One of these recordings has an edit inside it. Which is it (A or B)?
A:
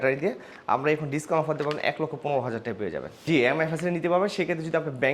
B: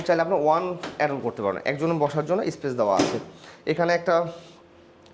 A